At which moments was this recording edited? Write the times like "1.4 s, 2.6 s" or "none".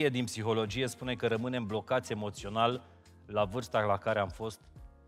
none